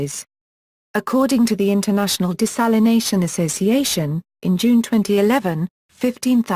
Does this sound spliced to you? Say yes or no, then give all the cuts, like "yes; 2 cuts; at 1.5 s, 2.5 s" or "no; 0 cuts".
yes; 1 cut; at 2.3 s